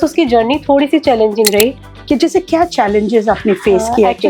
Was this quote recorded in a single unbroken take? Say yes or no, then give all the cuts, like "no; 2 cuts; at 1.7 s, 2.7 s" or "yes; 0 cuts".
no; 1 cut; at 1.9 s